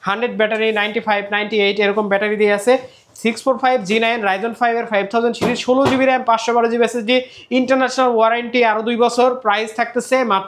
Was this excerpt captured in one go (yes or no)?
yes